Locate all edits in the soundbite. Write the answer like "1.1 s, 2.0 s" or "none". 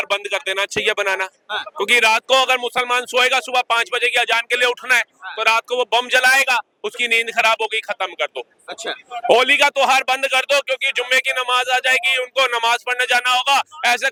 none